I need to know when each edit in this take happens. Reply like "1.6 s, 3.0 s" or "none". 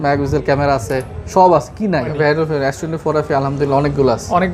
2.1 s